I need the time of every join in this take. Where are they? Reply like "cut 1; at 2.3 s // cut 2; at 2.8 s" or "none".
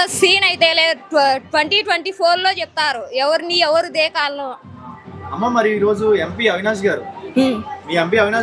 none